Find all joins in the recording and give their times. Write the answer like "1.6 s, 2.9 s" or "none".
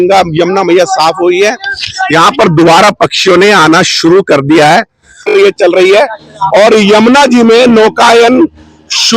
5.2 s